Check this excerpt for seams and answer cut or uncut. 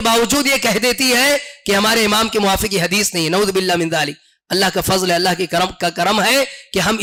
uncut